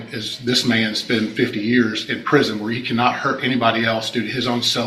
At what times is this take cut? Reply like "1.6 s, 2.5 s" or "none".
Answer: none

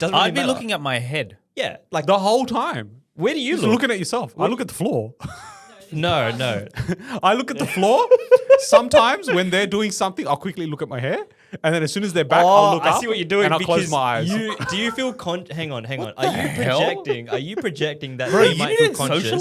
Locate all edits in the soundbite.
none

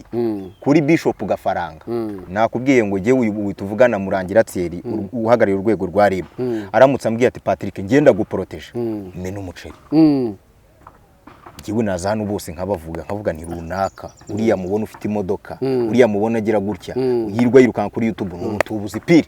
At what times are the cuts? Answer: 2.3 s

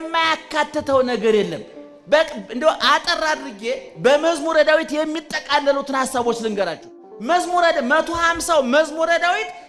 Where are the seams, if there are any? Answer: none

